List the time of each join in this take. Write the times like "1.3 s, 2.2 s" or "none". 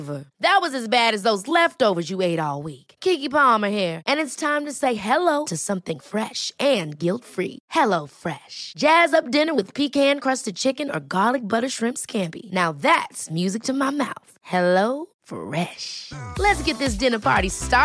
none